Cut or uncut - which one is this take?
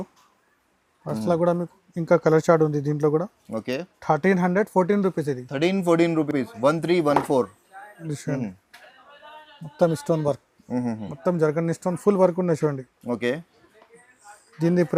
uncut